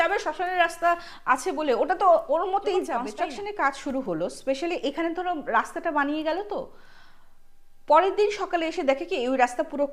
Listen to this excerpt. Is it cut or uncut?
cut